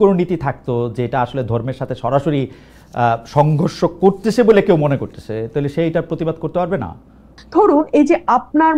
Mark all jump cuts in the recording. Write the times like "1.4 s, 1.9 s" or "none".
7.4 s

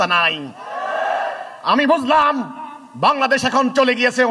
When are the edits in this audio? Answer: none

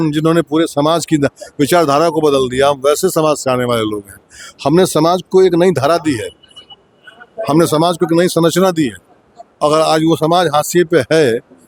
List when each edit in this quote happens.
none

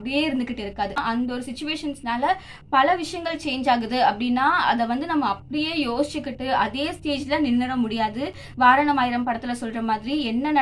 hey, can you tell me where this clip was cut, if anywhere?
1.0 s

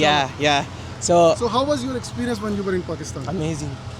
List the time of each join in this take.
none

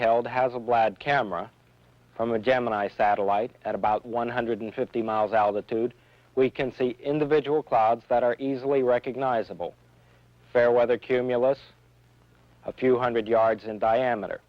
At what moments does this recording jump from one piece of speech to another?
7.7 s

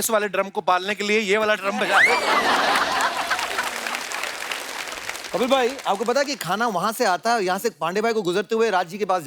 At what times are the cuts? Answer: none

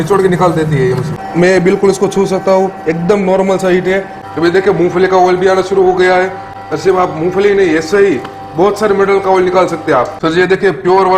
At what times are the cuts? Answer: 1.1 s, 4.2 s, 10.1 s

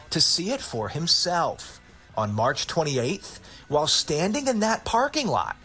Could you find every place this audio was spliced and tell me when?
none

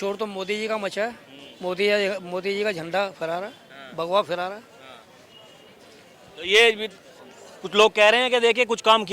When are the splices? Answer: none

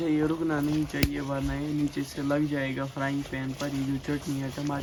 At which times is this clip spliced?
none

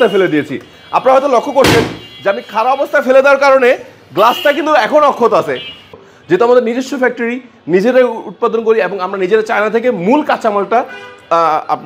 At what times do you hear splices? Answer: 5.8 s

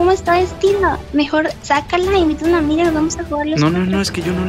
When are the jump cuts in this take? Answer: none

